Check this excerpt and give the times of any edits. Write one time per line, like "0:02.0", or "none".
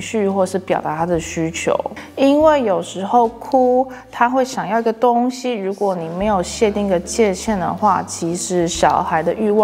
0:02.0